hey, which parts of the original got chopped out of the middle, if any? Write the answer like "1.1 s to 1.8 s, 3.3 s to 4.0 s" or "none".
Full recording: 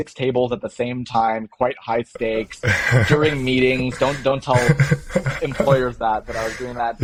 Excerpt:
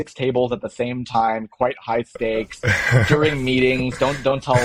none